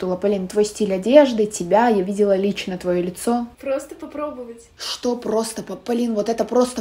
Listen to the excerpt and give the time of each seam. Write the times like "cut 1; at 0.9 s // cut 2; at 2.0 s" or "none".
cut 1; at 3.5 s